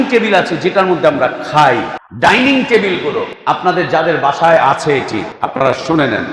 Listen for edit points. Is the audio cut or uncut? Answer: cut